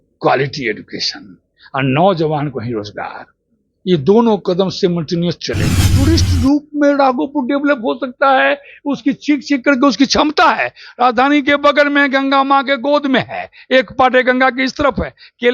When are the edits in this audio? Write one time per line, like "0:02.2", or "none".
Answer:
0:05.8